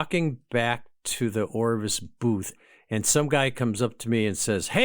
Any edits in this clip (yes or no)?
yes